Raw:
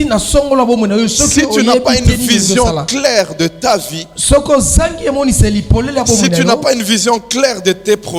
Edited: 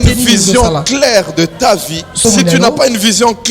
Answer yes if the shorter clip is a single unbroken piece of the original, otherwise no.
no